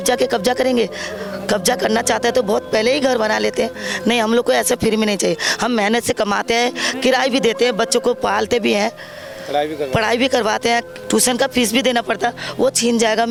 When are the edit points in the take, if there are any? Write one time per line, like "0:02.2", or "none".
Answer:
none